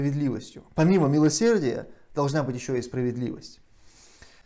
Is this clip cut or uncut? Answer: uncut